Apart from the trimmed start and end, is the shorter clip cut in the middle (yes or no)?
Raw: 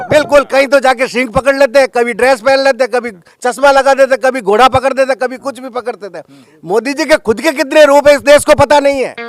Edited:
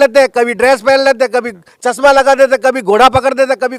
no